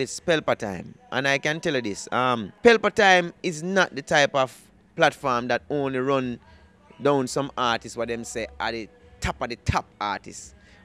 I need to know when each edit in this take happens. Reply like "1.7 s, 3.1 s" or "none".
2.5 s